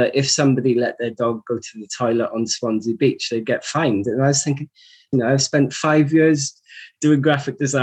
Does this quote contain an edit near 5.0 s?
yes; 1 cut; at 5.0 s

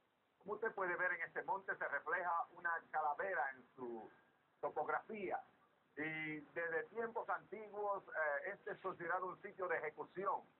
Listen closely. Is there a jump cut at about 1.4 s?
yes; 1 cut; at 1.4 s

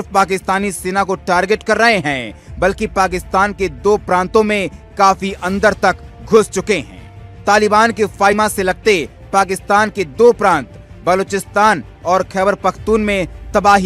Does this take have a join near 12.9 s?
no; 1 cut; at 8.3 s

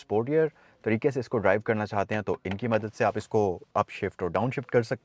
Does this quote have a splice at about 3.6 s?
yes; 1 cut; at 3.6 s

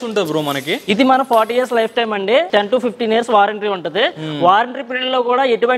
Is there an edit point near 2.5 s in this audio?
yes; 1 cut; at 2.5 s

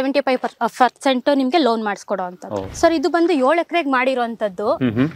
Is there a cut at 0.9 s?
no; 1 cut; at 2.6 s

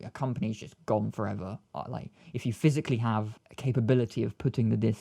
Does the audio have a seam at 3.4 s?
yes; 1 cut; at 3.4 s

